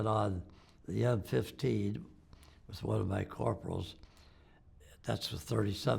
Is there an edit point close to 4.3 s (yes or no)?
no